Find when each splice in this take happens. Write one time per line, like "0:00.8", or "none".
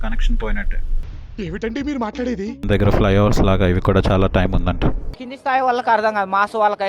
0:02.7

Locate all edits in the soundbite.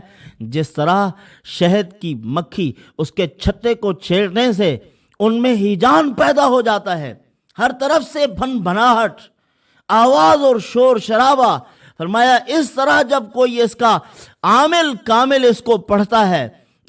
none

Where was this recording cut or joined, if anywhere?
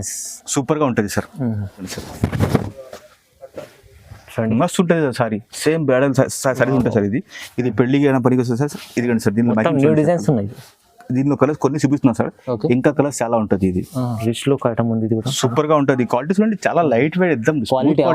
0:02.0
0:14.2

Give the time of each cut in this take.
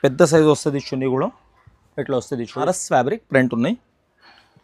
0:02.7

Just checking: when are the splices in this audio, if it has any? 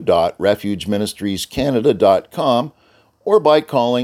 none

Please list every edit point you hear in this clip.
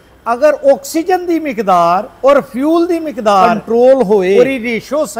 0:02.1
0:03.6
0:04.4

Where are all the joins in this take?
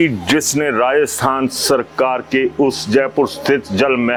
none

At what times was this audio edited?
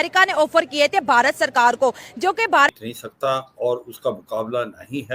0:02.7

